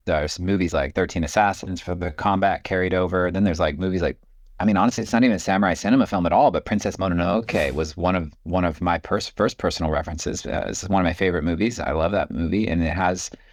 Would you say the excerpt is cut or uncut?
uncut